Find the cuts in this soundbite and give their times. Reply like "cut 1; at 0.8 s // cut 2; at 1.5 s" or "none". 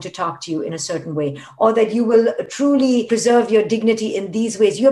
cut 1; at 1.4 s